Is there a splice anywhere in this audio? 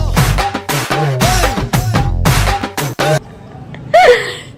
no; 0 cuts

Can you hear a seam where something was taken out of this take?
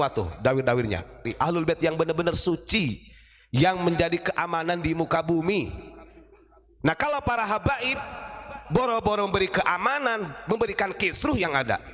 yes; 1 cut; at 1.3 s

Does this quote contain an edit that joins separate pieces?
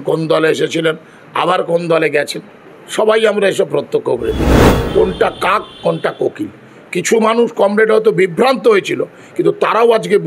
yes; 1 cut; at 4.8 s

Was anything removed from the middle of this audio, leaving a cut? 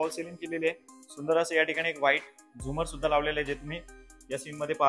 no; 0 cuts

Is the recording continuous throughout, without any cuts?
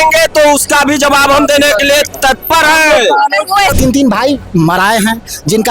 no; 1 cut; at 3.8 s

